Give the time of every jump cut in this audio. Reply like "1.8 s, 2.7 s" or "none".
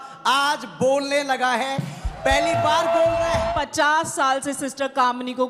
3.5 s